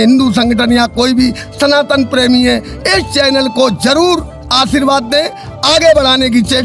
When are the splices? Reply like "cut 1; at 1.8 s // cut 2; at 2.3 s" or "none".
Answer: none